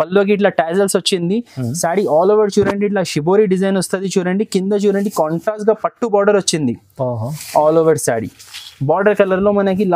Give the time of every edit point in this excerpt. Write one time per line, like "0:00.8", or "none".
none

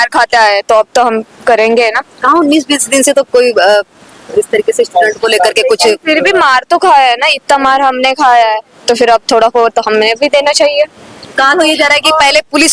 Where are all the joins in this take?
none

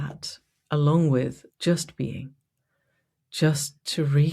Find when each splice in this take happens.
0:01.4

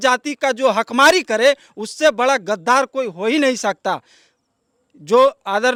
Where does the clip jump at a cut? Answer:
none

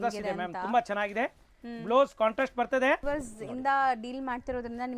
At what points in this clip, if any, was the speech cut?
0:03.0

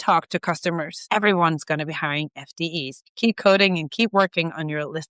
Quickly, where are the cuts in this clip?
0:01.0
0:03.0

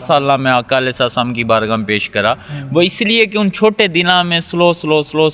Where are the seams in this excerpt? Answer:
none

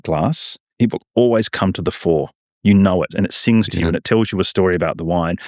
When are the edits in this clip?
0:03.1

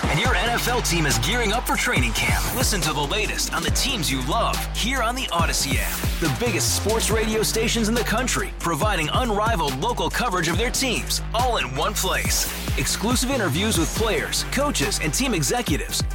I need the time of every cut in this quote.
none

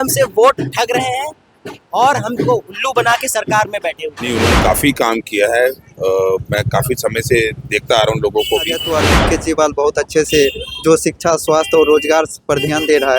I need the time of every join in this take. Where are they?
0:04.1
0:08.9

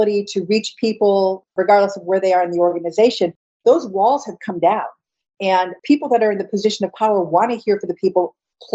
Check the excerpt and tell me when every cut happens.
0:03.6

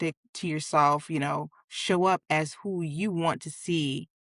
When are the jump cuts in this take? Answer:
none

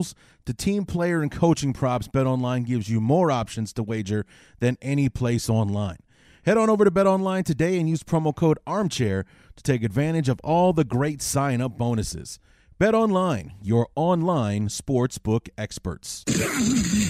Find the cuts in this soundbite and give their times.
0:16.2

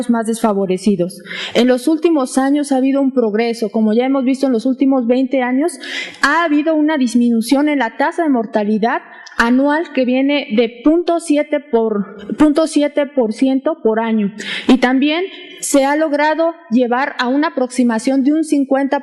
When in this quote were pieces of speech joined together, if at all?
0:05.8

